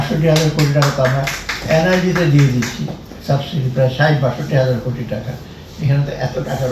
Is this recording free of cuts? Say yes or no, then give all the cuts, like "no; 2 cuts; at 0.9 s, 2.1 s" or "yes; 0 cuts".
yes; 0 cuts